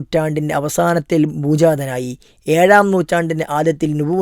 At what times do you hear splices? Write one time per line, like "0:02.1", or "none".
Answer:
none